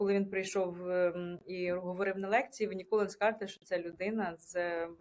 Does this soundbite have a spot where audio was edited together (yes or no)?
no